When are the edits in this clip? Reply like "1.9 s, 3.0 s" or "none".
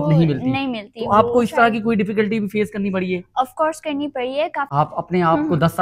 4.7 s